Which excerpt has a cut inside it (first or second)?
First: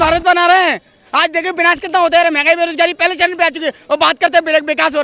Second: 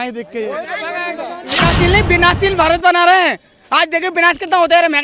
second